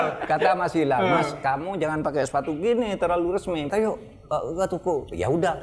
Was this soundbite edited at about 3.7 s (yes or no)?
yes